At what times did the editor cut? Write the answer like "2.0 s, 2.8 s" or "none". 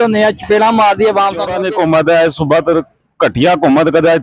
1.6 s